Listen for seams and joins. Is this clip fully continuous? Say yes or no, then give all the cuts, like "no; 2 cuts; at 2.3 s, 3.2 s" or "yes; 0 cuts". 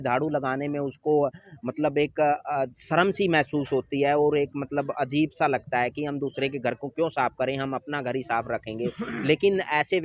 yes; 0 cuts